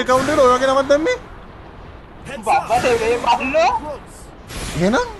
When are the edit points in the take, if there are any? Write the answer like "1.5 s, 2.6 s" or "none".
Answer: none